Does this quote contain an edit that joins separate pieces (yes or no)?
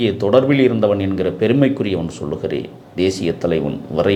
no